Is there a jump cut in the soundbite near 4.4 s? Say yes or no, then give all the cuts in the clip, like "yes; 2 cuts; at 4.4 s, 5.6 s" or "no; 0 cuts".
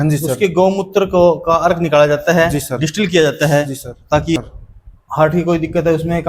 yes; 1 cut; at 4.4 s